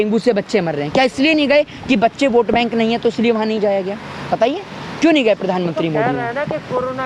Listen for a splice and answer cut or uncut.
uncut